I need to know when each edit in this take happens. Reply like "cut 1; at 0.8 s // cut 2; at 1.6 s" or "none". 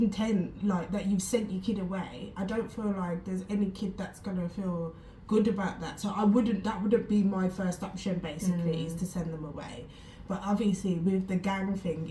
none

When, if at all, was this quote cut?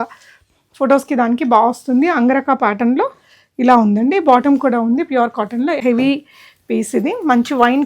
cut 1; at 5.8 s

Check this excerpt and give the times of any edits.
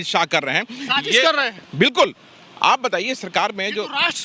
none

